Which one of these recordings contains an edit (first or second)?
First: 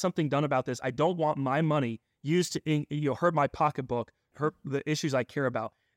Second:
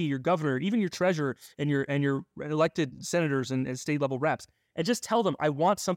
second